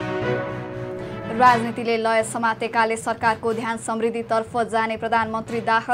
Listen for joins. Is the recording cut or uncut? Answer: cut